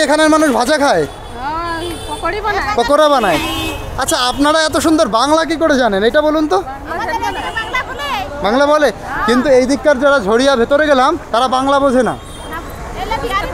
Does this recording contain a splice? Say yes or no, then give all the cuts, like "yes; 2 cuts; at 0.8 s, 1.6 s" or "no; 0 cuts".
no; 0 cuts